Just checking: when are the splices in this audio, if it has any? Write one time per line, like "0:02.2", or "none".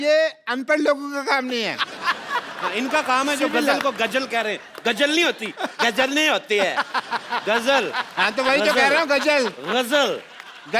none